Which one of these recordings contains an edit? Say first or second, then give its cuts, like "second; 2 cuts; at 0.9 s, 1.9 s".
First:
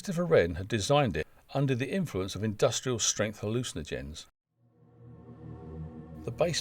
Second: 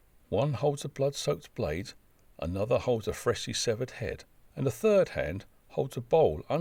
first; 1 cut; at 4.5 s